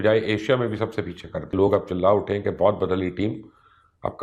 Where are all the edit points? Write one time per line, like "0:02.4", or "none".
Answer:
0:01.5